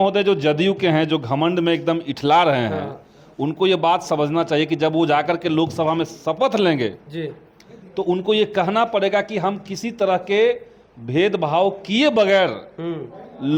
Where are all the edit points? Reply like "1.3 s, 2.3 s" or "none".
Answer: none